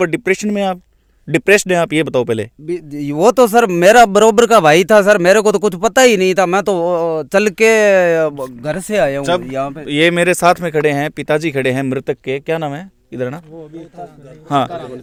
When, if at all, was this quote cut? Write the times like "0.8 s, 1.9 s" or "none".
none

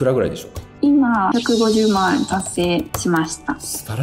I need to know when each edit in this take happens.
none

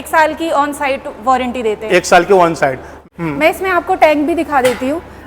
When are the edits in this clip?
none

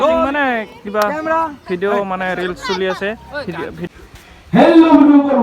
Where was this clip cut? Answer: 3.9 s

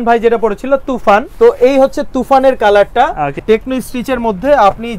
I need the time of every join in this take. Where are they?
1.3 s, 3.4 s

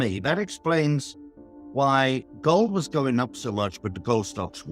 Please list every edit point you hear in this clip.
none

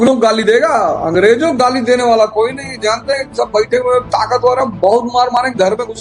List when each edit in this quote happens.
none

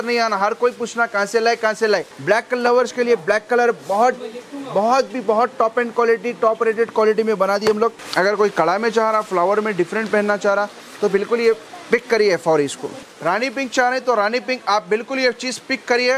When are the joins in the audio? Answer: 2.1 s, 8.0 s, 13.0 s

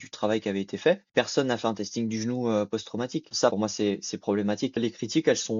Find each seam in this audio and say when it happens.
1.1 s, 3.4 s, 4.8 s

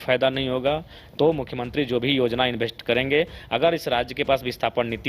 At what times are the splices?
1.0 s

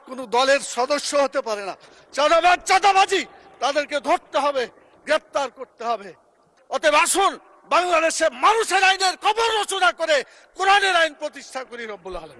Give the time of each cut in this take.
6.5 s

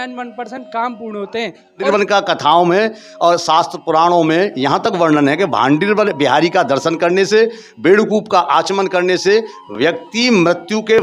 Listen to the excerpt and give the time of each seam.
1.9 s

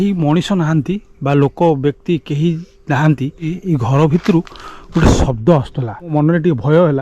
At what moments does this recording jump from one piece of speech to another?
3.6 s, 6.1 s

